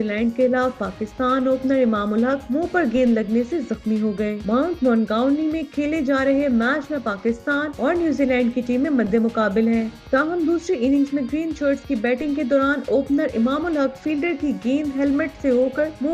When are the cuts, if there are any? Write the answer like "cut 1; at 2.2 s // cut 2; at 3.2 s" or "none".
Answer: none